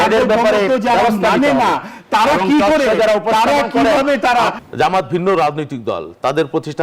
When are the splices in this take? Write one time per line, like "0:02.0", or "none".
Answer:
0:04.5